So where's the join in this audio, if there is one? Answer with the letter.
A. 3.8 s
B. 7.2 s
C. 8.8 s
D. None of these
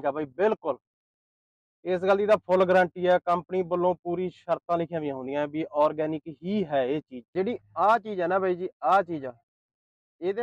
B